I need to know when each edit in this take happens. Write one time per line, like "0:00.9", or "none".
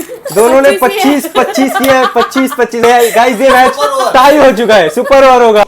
0:02.8